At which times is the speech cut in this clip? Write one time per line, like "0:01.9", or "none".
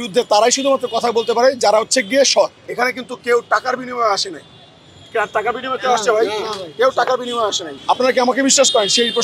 0:02.6
0:07.7